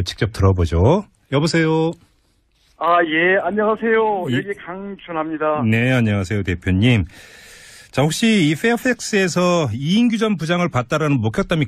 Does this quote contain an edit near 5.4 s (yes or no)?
no